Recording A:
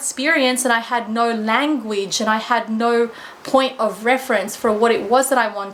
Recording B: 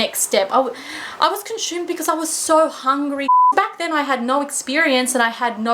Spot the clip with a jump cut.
B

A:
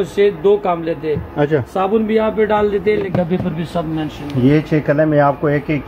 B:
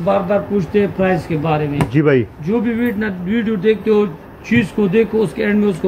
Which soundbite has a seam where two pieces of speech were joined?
A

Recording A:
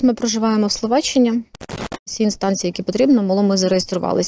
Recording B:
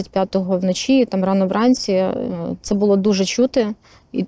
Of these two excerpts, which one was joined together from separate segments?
A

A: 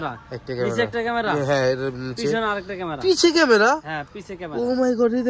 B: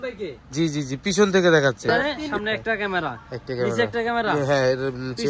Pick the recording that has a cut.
B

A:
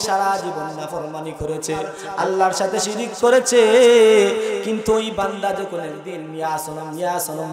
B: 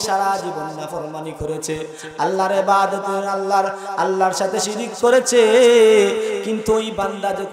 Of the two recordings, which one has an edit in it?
A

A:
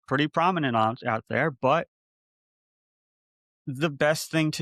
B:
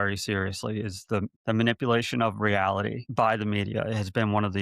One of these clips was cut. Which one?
B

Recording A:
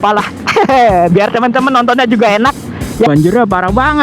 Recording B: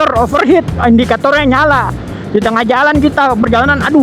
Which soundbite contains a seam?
A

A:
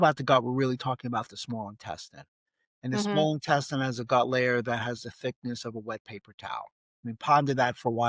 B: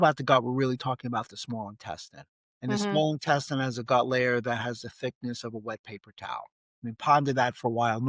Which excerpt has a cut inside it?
B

